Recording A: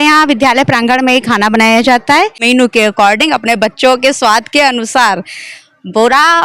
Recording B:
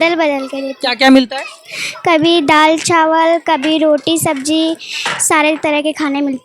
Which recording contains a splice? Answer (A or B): A